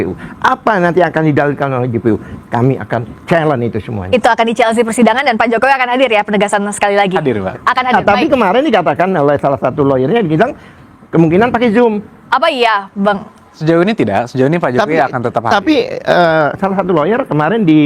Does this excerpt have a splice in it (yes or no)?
no